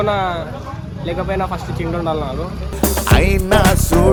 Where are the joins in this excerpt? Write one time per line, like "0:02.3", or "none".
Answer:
none